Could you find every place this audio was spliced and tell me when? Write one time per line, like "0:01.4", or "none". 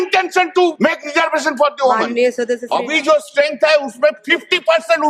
0:00.8
0:02.7

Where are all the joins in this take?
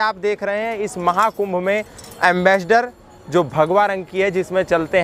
none

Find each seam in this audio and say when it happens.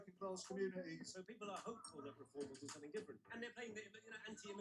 0:01.5
0:03.2

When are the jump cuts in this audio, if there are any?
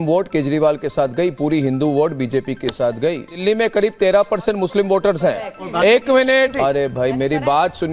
0:03.3
0:06.5

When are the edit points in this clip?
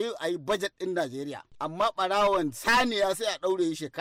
0:01.5

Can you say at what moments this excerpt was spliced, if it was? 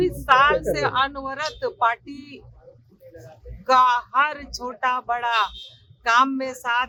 none

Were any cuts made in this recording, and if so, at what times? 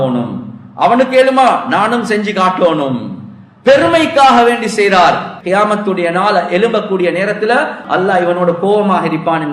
0:05.3
0:07.8

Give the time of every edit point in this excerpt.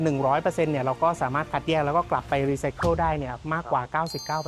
none

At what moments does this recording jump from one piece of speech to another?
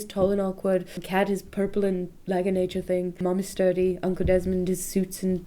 0:01.0
0:03.2

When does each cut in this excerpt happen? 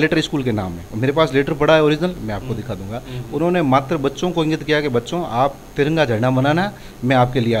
none

